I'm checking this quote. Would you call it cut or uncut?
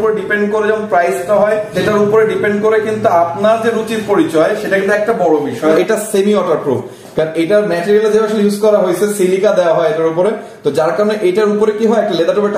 cut